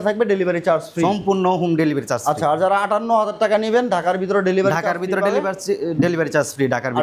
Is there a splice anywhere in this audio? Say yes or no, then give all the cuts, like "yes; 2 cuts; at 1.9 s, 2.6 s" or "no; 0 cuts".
no; 0 cuts